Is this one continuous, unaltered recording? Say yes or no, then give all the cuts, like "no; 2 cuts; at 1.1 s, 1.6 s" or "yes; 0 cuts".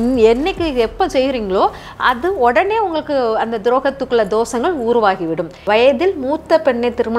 no; 1 cut; at 5.6 s